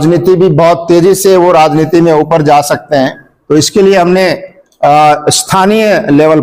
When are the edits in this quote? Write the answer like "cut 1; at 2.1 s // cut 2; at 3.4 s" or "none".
cut 1; at 3.3 s

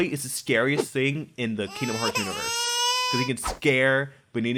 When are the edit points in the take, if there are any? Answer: none

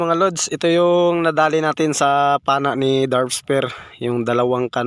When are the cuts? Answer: none

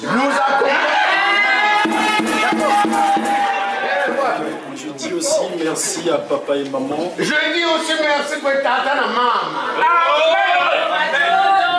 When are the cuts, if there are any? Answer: cut 1; at 3.8 s

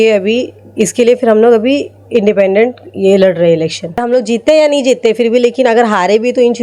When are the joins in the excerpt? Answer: cut 1; at 4.0 s

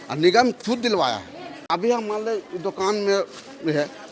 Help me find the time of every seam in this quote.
cut 1; at 1.6 s

